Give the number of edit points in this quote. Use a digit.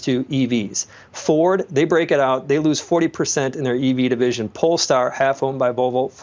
0